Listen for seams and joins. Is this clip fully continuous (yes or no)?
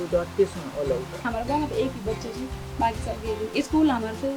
no